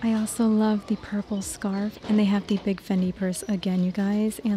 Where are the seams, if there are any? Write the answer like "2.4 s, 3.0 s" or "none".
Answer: 2.0 s